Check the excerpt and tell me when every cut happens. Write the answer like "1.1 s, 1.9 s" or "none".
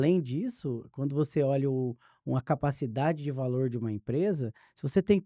none